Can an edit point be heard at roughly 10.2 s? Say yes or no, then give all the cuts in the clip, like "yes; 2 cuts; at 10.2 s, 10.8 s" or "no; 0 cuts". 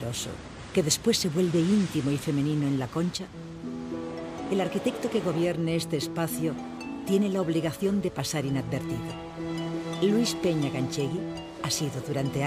yes; 1 cut; at 10.2 s